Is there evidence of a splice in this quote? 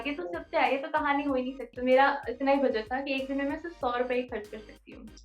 yes; 1 cut; at 1.7 s

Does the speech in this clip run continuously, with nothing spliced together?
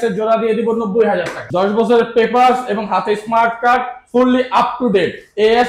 no; 1 cut; at 1.4 s

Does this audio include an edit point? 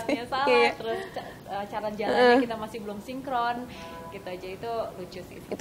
no; 0 cuts

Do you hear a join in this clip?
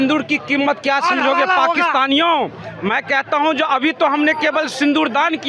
no; 0 cuts

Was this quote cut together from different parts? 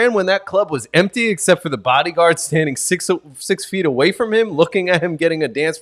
no; 0 cuts

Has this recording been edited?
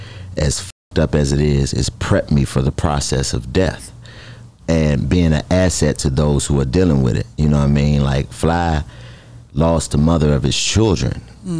no; 0 cuts

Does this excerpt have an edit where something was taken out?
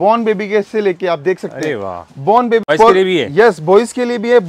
yes; 1 cut; at 2.6 s

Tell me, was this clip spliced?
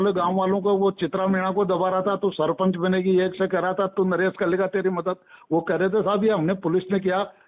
no; 0 cuts

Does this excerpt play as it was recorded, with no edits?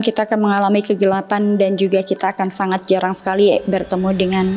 yes; 0 cuts

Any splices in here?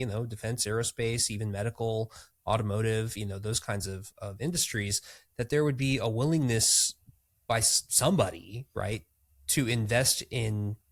no; 0 cuts

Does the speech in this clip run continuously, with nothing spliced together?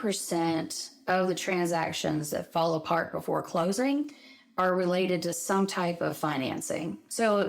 yes; 0 cuts

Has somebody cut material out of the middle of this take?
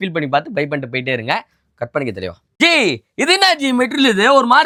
no; 0 cuts

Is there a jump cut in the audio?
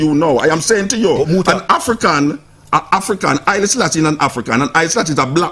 no; 0 cuts

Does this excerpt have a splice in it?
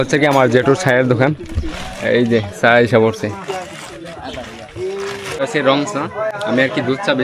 yes; 1 cut; at 5.5 s

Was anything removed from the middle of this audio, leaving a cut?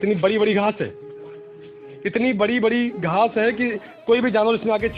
no; 0 cuts

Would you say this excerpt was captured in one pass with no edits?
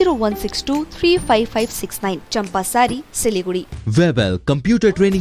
no; 1 cut; at 3.8 s

